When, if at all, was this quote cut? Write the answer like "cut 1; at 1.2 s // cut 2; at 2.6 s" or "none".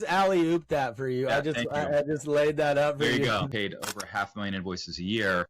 cut 1; at 3.4 s